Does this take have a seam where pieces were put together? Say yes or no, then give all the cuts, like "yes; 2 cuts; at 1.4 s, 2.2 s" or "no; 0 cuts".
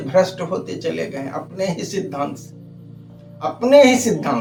no; 0 cuts